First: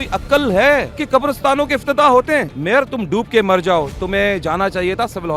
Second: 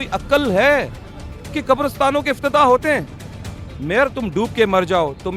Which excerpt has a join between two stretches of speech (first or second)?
first